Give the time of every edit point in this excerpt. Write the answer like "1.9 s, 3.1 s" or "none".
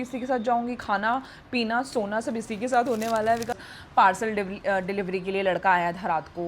3.5 s

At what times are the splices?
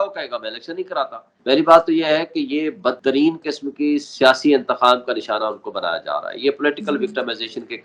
1.3 s

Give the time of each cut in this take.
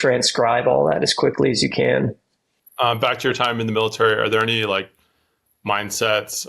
none

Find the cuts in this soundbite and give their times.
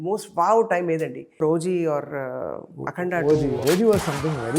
1.4 s, 3.6 s

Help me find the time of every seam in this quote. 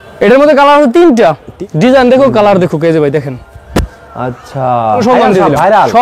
1.5 s, 5.0 s

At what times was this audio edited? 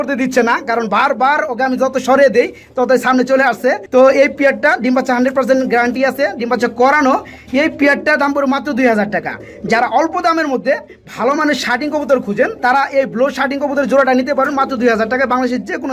none

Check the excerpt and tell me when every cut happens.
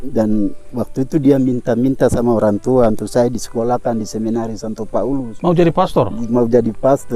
none

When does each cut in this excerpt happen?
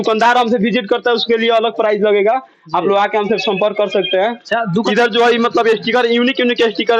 4.8 s

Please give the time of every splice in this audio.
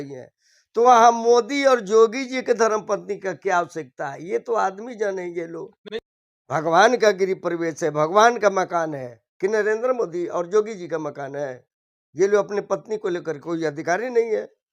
5.8 s

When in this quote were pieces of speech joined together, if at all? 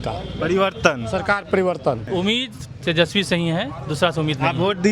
2.0 s

